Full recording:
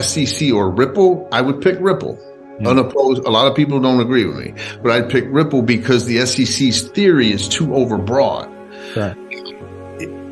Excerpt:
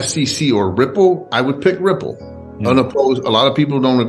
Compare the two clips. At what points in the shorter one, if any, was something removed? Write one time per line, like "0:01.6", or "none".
none